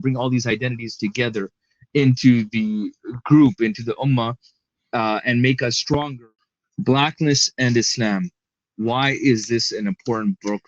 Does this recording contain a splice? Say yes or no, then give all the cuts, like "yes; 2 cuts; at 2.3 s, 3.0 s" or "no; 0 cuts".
yes; 1 cut; at 6.1 s